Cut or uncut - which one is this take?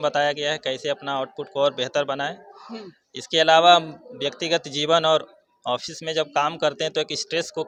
uncut